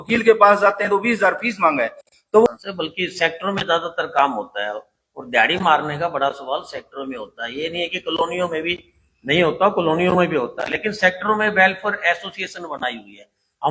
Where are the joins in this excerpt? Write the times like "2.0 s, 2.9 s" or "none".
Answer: 2.5 s